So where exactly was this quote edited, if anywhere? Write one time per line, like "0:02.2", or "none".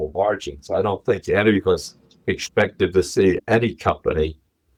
none

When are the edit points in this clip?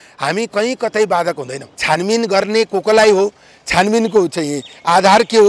0:01.7

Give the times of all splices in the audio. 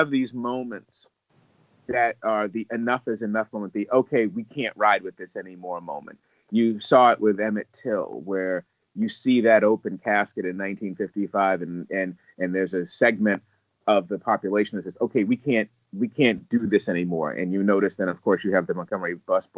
none

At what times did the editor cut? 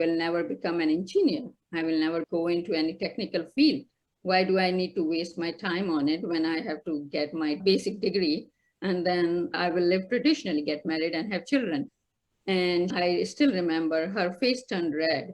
0:02.2
0:11.9
0:12.9

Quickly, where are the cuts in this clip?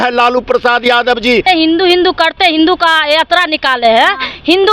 0:01.4

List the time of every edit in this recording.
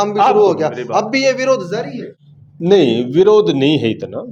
none

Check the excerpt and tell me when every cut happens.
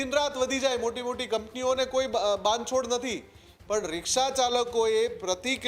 none

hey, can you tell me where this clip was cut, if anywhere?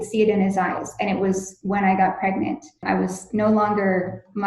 0:02.8

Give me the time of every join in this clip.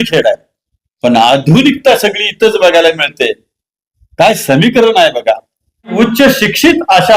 0:05.9

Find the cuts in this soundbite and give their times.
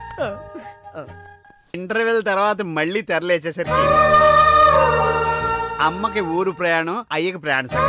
0:01.7

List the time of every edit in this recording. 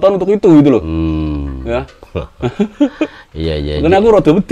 none

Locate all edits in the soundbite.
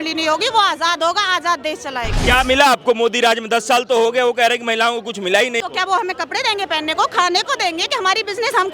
0:02.2
0:05.6

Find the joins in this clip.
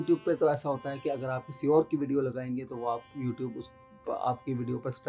none

